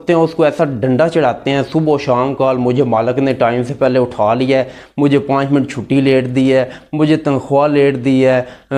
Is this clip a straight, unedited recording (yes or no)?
yes